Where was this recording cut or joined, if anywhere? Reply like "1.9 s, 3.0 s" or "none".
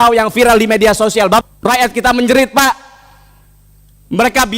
1.4 s